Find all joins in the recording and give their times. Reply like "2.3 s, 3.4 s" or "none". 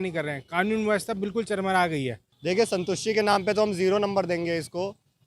2.3 s